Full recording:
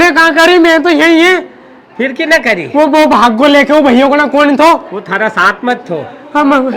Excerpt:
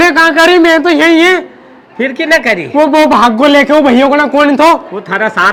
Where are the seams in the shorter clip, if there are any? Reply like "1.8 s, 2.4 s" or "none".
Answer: none